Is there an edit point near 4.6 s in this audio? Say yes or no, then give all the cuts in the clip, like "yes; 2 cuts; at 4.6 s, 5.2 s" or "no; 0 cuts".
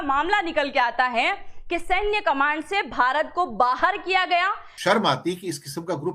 yes; 1 cut; at 4.6 s